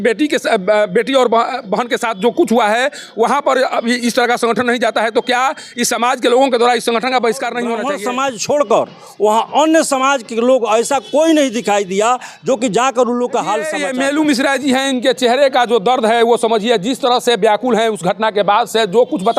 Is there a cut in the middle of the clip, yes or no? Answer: yes